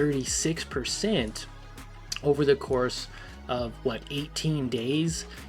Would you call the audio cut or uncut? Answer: uncut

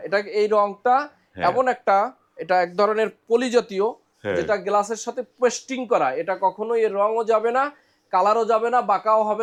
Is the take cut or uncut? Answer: uncut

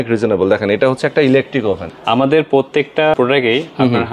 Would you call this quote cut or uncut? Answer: cut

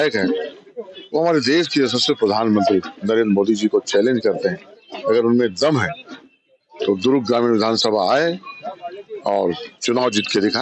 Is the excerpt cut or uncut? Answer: uncut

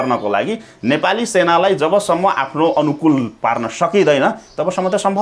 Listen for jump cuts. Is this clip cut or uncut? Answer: uncut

